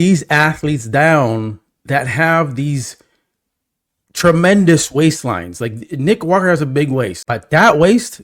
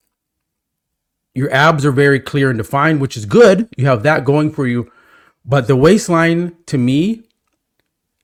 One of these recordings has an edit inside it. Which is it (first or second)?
first